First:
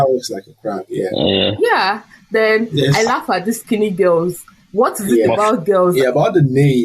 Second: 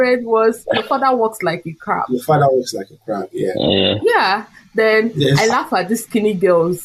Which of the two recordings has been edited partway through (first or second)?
first